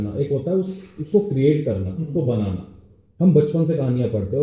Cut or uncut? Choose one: uncut